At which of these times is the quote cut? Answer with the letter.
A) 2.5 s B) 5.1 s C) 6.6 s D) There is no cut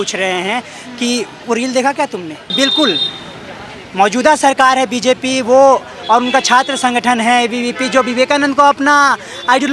A